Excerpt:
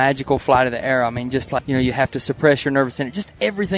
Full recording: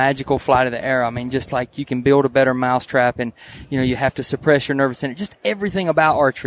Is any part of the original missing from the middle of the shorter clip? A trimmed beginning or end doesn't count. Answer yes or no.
yes